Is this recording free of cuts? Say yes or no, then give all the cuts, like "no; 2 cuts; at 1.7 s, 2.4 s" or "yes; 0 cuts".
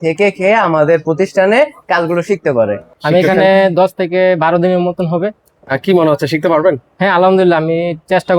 no; 1 cut; at 2.8 s